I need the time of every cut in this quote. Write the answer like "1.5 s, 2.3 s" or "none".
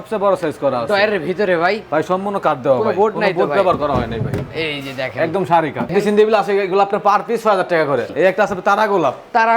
5.9 s, 8.1 s

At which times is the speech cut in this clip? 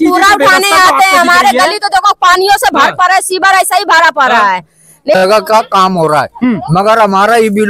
5.2 s

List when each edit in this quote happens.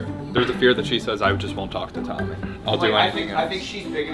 none

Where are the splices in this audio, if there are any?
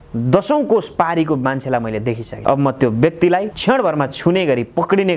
2.3 s, 3.5 s

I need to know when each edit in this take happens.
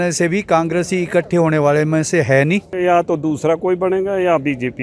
2.7 s

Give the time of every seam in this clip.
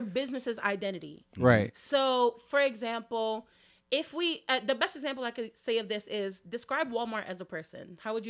none

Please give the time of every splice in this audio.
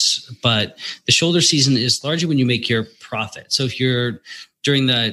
none

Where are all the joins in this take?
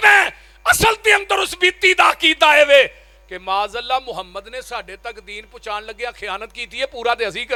none

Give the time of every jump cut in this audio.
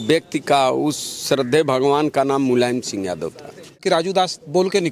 3.8 s

